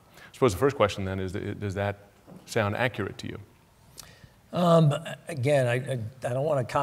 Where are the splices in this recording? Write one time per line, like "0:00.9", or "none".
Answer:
none